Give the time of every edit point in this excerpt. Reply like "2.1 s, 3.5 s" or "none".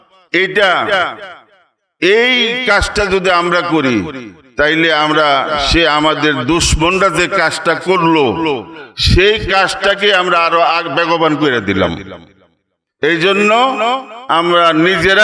none